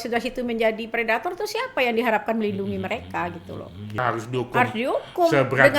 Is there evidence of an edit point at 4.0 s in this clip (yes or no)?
yes